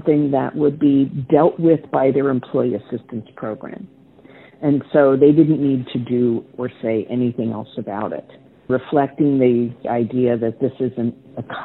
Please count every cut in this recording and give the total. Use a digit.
2